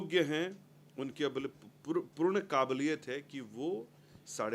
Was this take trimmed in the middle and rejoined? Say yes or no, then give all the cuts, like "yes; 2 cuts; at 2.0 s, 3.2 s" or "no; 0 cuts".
no; 0 cuts